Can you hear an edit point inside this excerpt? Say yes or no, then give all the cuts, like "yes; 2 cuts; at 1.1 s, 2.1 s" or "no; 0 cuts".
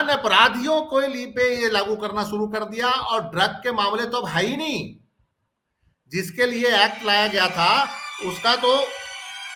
no; 0 cuts